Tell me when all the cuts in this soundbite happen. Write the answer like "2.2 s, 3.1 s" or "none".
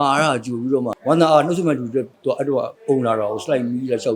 0.9 s